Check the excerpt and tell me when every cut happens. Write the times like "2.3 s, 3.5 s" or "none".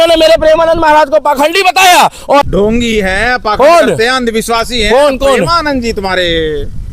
2.4 s